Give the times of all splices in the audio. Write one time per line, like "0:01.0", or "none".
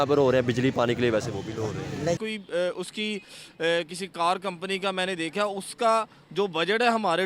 0:02.2

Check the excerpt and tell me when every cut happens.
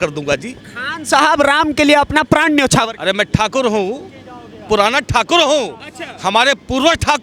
none

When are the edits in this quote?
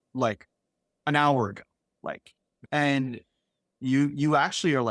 0:02.6

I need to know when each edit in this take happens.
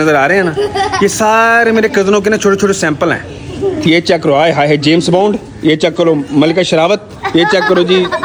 0:03.8
0:05.5

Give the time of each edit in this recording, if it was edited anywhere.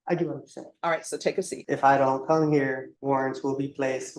0:01.6
0:02.9

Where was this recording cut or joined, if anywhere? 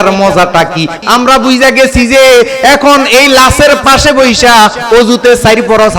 0:01.0

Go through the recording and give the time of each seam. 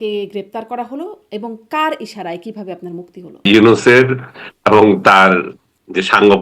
0:03.5

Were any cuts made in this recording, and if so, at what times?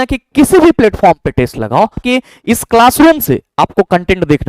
0:02.0

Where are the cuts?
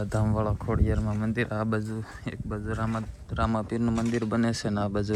none

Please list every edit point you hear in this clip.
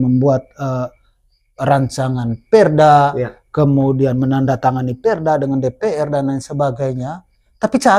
none

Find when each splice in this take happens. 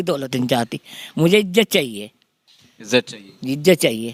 none

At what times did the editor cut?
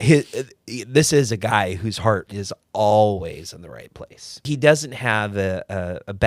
0:04.4

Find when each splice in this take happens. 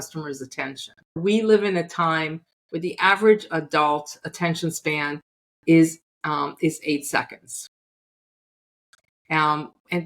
0:01.2

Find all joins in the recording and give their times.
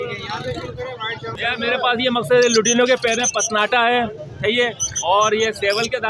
0:01.5

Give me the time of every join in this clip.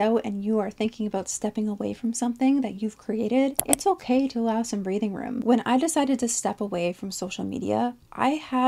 0:03.6
0:05.4

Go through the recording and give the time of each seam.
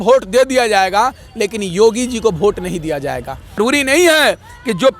0:03.6

